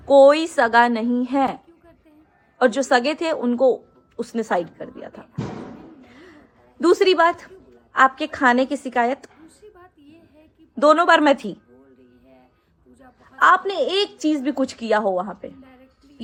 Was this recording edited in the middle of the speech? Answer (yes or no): no